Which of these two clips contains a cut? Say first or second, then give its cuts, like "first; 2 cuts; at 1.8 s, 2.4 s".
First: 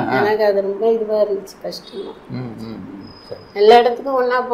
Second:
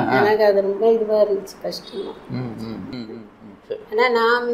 second; 1 cut; at 2.9 s